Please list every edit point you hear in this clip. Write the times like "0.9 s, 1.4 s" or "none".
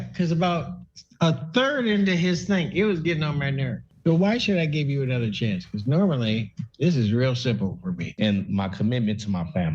3.8 s, 8.1 s